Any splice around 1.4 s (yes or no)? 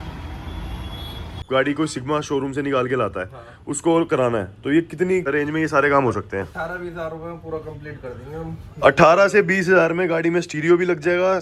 yes